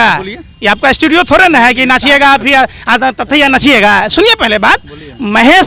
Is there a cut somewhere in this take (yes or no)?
no